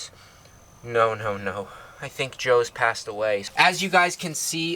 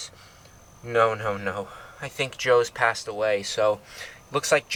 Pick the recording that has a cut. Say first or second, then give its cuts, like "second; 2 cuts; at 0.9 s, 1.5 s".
first; 1 cut; at 3.5 s